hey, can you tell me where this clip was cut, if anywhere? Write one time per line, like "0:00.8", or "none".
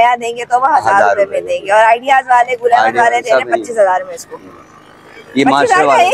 none